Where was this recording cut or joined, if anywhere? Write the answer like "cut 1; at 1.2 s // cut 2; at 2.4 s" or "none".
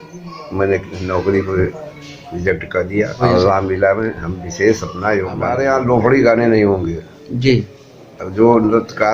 cut 1; at 3.2 s // cut 2; at 5.5 s